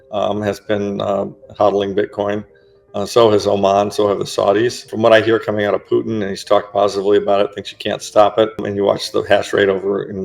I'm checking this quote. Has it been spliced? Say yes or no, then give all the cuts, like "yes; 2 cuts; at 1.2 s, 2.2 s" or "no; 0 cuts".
yes; 2 cuts; at 4.9 s, 8.6 s